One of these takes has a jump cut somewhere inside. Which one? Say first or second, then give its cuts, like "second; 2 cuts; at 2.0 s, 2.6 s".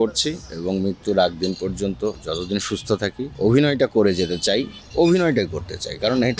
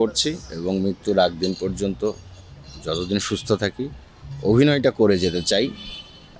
first; 3 cuts; at 2.2 s, 3.3 s, 4.8 s